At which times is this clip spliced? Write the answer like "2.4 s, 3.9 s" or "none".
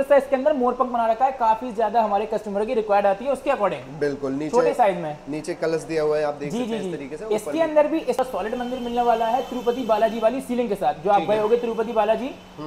8.2 s